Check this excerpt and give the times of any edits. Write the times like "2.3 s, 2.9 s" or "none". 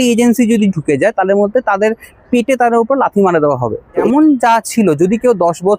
4.1 s